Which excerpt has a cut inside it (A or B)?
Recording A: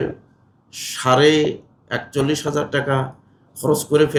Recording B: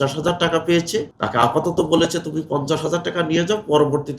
B